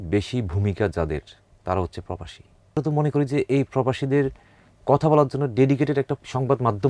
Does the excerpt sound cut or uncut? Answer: cut